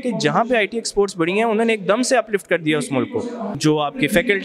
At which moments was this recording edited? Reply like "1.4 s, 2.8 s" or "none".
3.5 s